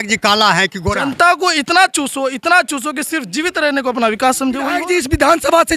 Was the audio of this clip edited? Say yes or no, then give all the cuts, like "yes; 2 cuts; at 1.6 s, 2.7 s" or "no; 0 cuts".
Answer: yes; 2 cuts; at 1.0 s, 4.8 s